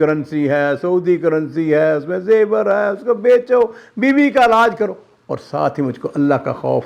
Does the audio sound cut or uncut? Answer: uncut